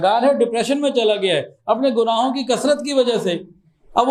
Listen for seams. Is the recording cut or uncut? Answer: uncut